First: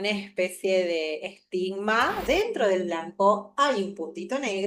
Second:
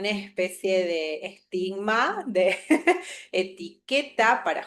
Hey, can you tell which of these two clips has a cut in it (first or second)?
first